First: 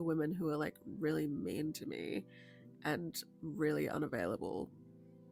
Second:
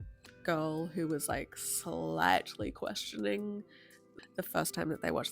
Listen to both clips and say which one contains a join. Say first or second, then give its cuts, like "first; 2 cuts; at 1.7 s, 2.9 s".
second; 1 cut; at 4.1 s